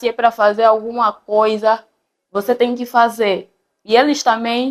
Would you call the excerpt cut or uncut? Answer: uncut